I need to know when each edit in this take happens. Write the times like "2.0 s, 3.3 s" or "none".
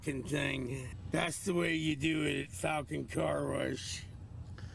0.9 s